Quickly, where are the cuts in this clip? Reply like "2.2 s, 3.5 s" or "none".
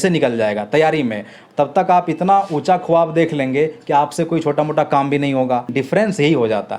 5.7 s

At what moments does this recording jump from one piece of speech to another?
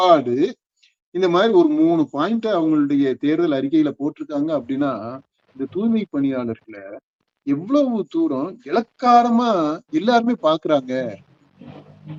none

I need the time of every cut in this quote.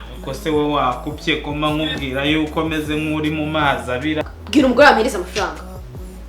4.3 s

